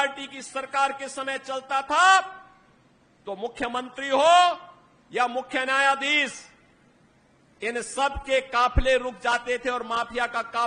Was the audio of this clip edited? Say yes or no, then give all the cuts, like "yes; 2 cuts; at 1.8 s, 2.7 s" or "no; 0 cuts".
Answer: no; 0 cuts